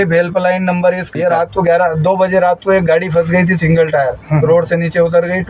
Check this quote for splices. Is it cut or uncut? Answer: cut